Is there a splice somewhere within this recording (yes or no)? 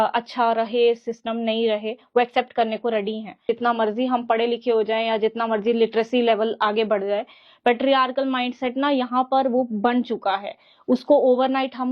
yes